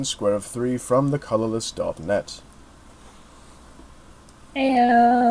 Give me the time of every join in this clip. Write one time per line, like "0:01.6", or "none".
0:03.8

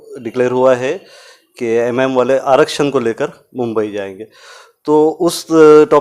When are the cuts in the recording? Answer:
none

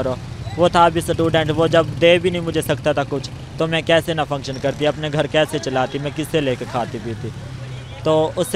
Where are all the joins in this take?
none

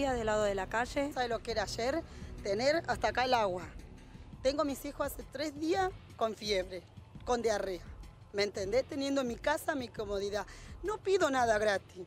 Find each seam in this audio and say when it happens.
0:01.1

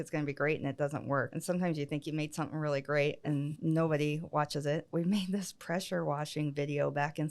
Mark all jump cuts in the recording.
0:01.3
0:03.5
0:04.9

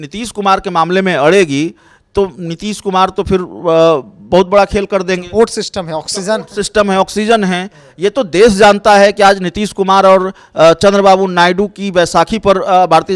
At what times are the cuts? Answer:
none

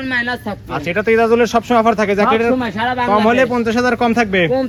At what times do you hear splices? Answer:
none

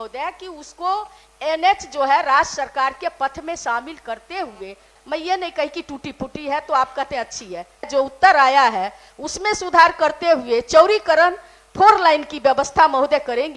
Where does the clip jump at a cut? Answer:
0:04.9
0:07.9

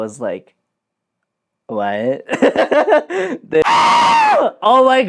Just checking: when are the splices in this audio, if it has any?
0:03.7

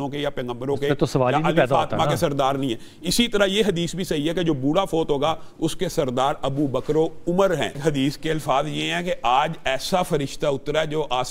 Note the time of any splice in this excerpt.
0:07.8

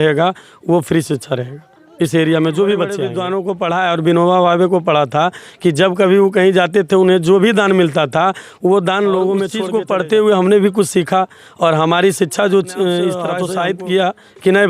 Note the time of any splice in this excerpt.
0:03.1
0:09.6
0:13.4

